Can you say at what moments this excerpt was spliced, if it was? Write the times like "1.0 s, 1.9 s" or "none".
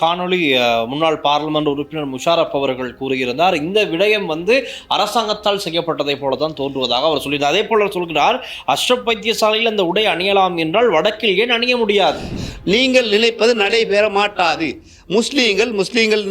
12.3 s